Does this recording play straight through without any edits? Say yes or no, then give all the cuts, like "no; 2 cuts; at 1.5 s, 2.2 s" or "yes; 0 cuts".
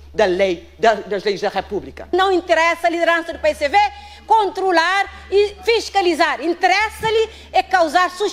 no; 1 cut; at 2.1 s